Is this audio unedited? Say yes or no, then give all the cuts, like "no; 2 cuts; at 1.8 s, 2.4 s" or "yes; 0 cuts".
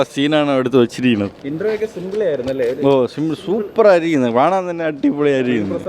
yes; 0 cuts